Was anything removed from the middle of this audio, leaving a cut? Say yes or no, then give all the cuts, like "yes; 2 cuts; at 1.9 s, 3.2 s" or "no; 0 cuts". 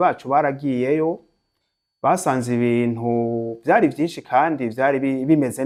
no; 0 cuts